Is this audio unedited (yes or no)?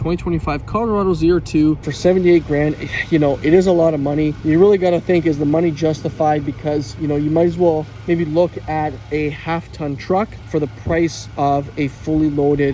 no